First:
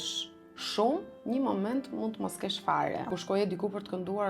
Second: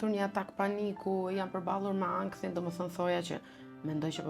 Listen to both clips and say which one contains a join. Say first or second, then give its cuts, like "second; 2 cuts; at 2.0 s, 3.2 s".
first; 1 cut; at 3.1 s